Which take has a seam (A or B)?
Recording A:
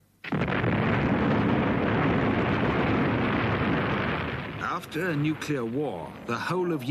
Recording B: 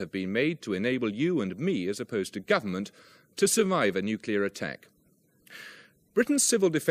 B